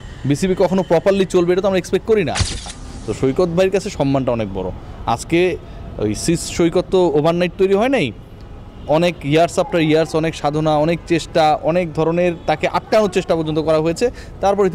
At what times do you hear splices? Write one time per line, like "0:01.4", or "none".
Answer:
0:02.7

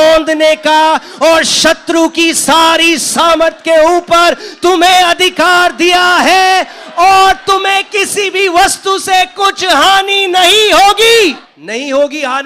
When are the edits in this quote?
0:11.5

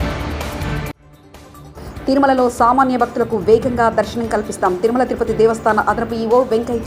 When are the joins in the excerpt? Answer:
none

